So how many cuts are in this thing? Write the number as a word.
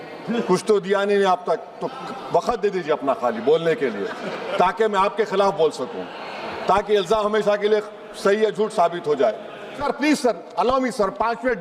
one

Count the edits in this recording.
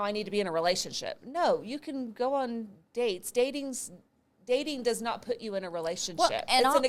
zero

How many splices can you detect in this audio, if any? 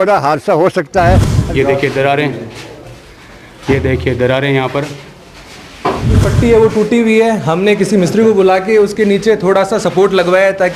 two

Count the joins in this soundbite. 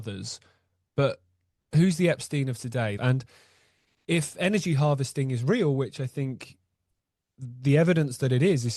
one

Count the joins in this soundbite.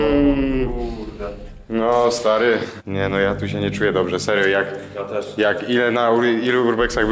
one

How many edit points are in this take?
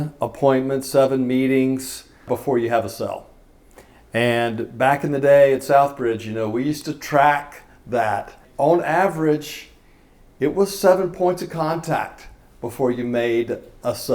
two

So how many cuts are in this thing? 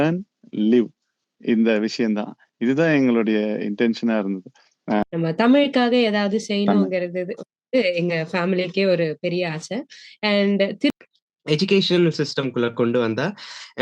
two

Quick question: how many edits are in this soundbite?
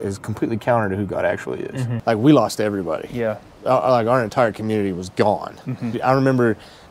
two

